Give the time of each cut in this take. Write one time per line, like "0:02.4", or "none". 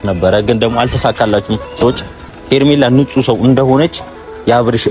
0:02.3

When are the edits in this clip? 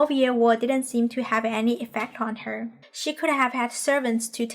0:02.9

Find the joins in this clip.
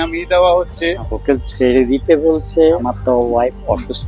0:01.1
0:02.8

